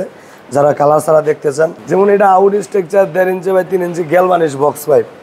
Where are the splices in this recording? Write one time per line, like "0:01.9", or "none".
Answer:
0:01.8